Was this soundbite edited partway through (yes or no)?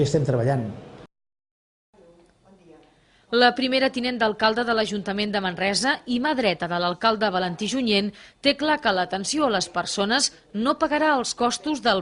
yes